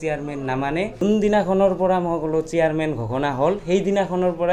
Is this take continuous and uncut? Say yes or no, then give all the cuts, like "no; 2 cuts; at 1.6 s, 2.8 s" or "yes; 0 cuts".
no; 1 cut; at 0.9 s